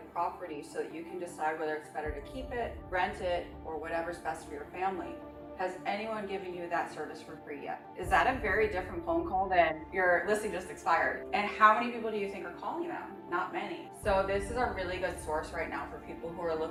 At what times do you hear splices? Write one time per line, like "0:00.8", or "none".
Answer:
none